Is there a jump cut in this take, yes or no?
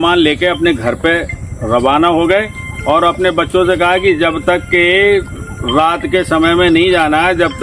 no